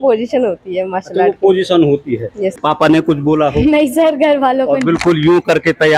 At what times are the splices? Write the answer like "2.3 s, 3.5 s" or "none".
2.6 s